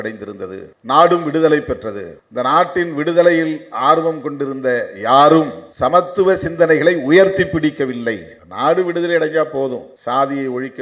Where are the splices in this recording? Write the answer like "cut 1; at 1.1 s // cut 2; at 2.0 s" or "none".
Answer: cut 1; at 5.6 s